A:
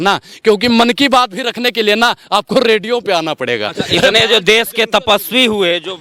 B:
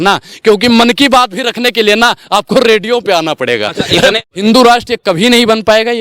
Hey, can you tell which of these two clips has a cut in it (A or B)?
B